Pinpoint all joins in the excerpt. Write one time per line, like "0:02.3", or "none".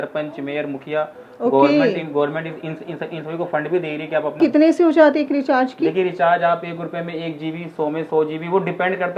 0:04.3